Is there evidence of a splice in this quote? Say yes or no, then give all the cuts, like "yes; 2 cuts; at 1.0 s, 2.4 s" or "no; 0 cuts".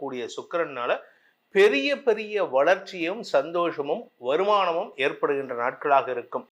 no; 0 cuts